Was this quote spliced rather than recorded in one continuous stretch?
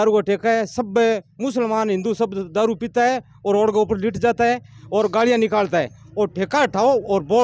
no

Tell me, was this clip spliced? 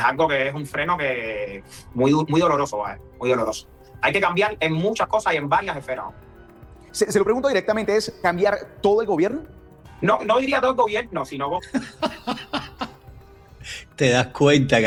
no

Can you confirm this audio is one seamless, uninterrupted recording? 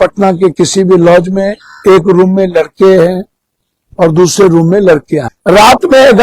no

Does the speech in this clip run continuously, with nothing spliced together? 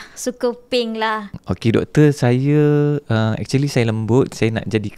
no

